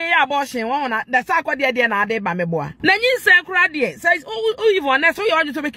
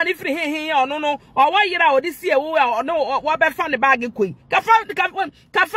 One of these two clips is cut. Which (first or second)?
first